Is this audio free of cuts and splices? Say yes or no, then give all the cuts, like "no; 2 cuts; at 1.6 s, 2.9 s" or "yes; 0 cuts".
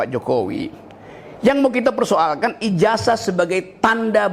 yes; 0 cuts